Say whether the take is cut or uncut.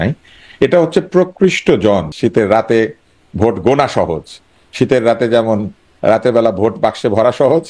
cut